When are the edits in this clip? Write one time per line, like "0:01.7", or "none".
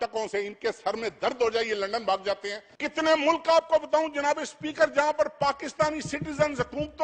0:02.7